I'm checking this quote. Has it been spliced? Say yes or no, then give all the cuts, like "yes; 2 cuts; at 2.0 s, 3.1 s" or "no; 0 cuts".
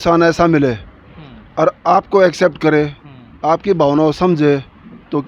no; 0 cuts